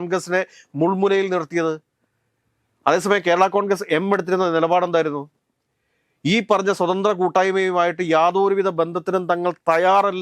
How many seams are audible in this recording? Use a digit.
0